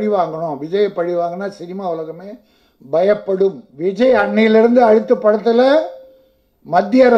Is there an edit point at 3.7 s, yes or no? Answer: yes